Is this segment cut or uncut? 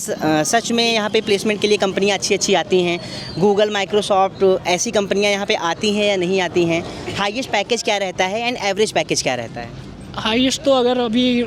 uncut